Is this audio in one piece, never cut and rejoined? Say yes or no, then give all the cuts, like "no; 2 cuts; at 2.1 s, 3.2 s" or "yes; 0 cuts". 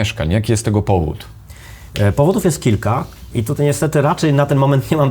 yes; 0 cuts